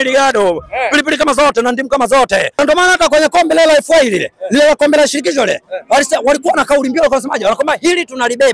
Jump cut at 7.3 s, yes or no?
no